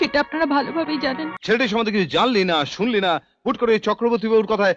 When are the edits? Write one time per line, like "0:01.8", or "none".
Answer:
0:01.3